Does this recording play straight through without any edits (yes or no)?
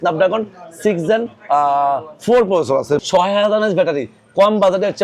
no